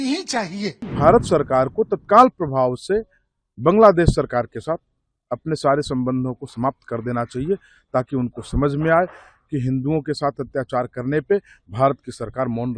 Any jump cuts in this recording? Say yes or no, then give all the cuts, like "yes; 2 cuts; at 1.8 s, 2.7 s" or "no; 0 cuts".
yes; 1 cut; at 0.9 s